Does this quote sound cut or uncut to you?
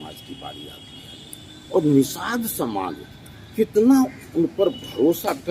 uncut